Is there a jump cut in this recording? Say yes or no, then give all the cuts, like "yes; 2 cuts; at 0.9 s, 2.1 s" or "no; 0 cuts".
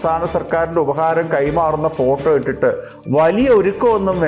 no; 0 cuts